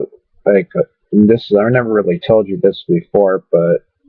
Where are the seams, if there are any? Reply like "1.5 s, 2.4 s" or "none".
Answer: 1.7 s